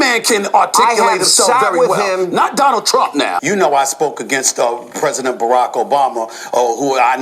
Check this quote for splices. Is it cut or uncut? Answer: cut